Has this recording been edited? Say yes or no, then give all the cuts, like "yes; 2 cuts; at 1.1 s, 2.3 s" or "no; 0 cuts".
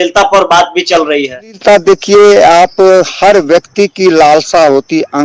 yes; 1 cut; at 1.6 s